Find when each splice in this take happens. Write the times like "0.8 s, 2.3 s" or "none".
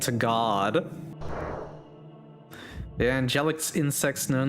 1.1 s